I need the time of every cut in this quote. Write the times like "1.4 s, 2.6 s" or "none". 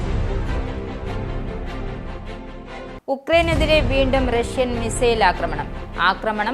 1.1 s